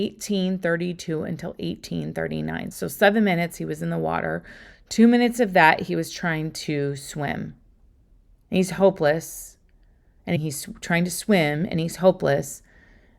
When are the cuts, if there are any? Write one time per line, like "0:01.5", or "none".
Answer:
0:02.8